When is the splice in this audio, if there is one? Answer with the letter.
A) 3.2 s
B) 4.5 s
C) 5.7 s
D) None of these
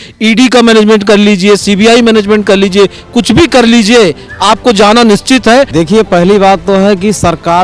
C